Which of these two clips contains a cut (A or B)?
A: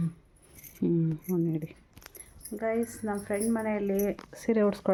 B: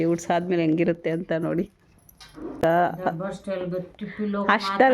B